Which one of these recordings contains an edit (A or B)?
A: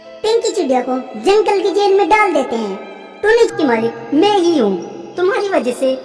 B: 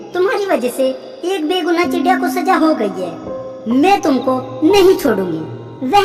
A